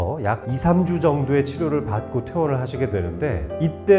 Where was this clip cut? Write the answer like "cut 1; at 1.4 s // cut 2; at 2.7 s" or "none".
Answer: none